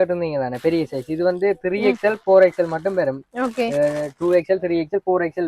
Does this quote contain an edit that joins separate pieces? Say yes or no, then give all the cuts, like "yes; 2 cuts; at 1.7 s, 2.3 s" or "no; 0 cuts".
no; 0 cuts